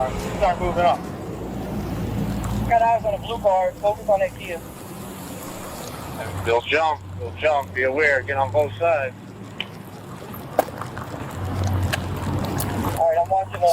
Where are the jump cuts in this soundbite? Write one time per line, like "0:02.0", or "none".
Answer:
0:05.8